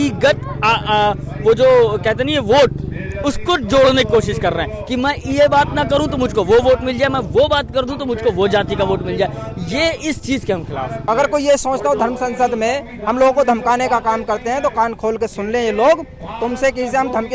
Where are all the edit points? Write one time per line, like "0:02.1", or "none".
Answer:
0:11.0